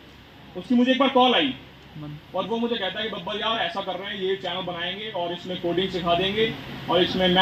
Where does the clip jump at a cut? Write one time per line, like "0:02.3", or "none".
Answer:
none